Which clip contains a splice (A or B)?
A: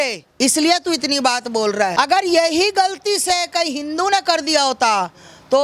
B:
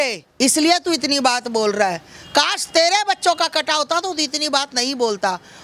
A